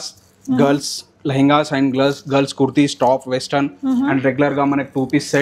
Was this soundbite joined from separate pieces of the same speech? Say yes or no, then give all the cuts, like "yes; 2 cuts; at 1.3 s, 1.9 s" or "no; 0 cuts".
no; 0 cuts